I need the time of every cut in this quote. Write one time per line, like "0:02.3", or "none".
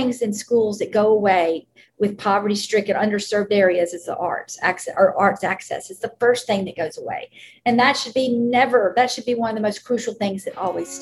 none